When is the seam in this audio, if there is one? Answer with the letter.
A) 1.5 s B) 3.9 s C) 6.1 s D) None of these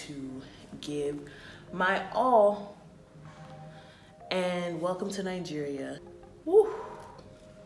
C